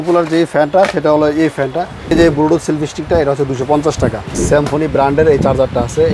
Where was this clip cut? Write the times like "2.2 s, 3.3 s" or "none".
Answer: 2.1 s, 4.4 s